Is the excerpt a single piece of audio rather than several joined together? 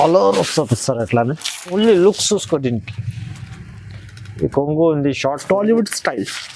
no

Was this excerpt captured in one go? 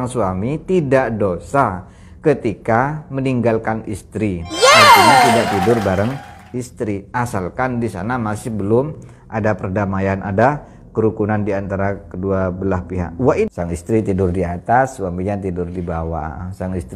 no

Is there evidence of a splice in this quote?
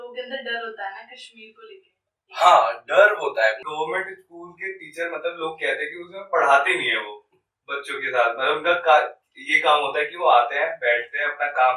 yes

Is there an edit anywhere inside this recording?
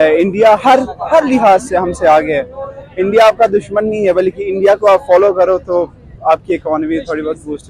no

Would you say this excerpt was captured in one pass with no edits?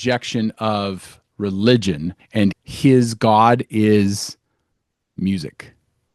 no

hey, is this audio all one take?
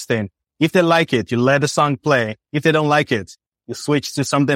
yes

